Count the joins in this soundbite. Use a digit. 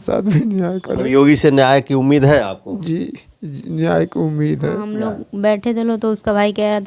1